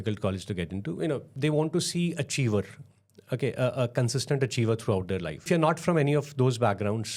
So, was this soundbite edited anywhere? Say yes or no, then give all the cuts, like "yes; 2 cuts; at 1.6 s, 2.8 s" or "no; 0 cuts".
yes; 2 cuts; at 1.3 s, 5.5 s